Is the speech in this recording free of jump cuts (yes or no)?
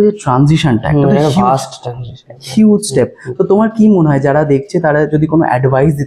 yes